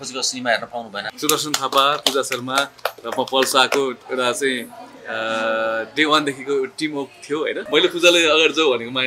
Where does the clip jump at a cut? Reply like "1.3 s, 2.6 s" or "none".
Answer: 1.0 s, 7.6 s